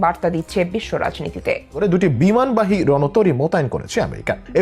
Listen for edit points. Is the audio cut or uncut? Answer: cut